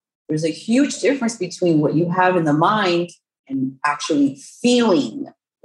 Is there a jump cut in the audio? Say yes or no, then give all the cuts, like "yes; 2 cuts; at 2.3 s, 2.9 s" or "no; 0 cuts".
yes; 1 cut; at 3.5 s